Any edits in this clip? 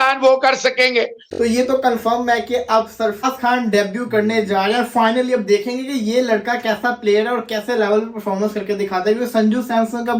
yes; 1 cut; at 1.2 s

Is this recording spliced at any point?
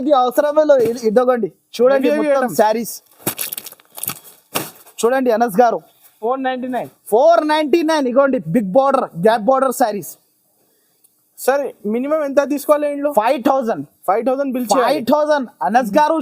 no; 0 cuts

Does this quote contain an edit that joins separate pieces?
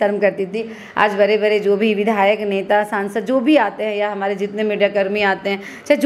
no; 0 cuts

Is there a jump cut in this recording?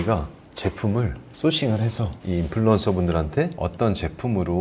yes; 1 cut; at 3.6 s

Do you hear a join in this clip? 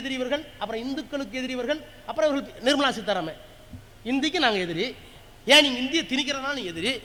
no; 0 cuts

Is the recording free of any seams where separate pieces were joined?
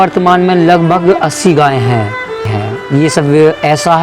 no; 1 cut; at 2.6 s

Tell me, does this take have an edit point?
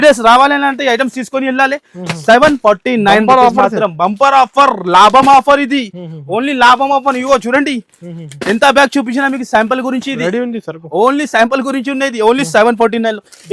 no; 0 cuts

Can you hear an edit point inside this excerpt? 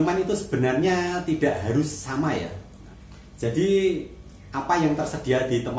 yes; 1 cut; at 2.8 s

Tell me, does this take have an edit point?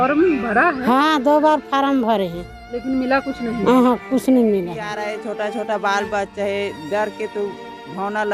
yes; 1 cut; at 4.9 s

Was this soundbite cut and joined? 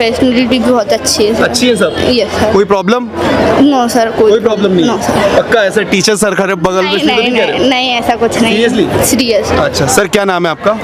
no; 0 cuts

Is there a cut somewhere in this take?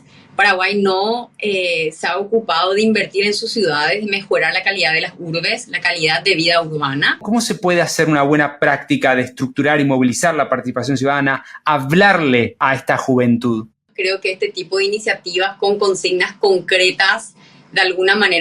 yes; 3 cuts; at 7.2 s, 12.6 s, 13.9 s

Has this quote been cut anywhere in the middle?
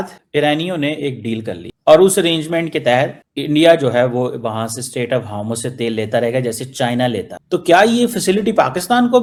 no; 0 cuts

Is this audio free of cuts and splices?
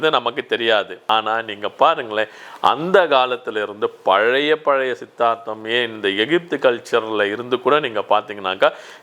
no; 1 cut; at 1.1 s

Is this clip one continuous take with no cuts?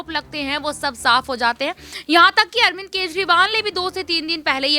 yes; 0 cuts

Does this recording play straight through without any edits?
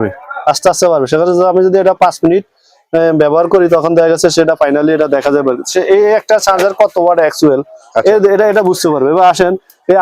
yes; 0 cuts

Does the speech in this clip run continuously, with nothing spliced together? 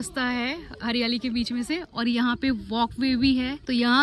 yes; 0 cuts

